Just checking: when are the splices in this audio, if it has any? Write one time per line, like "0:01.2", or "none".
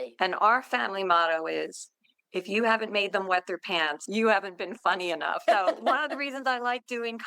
0:04.0